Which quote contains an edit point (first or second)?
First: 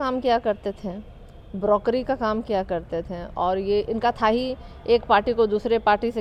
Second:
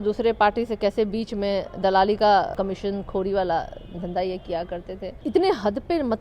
second